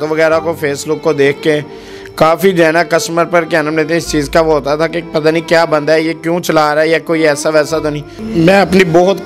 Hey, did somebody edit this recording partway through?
yes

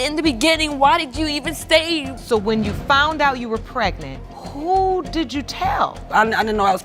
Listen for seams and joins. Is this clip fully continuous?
no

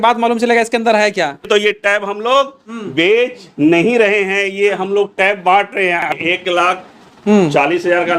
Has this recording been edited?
yes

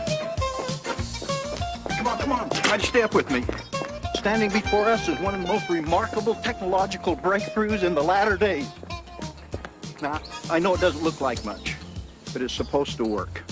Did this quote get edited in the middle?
yes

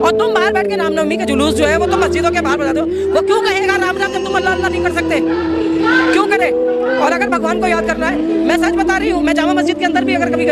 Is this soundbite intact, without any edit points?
yes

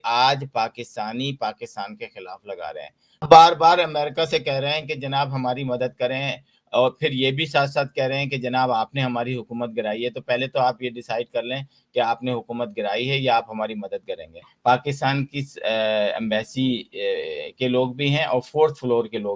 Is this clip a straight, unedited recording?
no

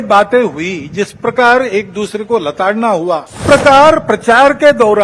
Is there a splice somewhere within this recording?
yes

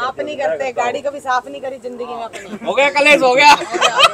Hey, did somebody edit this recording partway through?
no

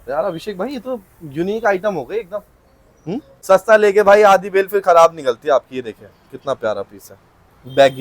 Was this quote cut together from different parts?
yes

